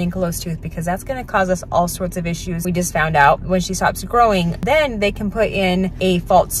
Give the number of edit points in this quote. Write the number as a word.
one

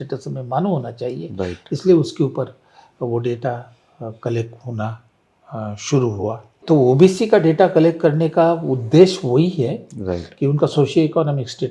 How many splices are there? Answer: one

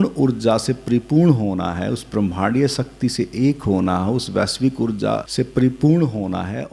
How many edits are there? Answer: one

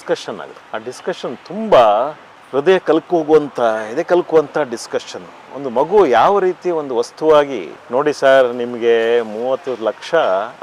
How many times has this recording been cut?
zero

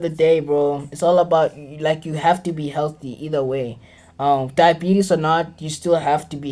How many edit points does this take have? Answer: zero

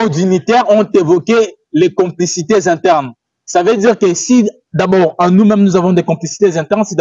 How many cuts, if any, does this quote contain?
zero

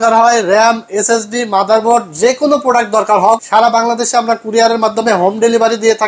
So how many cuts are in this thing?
one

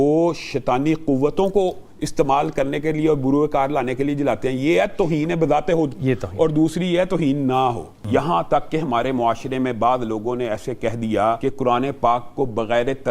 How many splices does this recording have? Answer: two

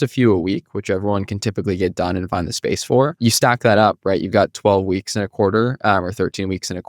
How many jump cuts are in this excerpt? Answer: one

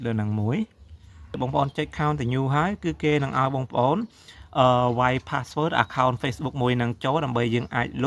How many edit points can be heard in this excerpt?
one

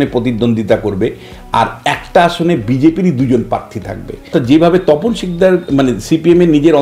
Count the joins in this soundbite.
one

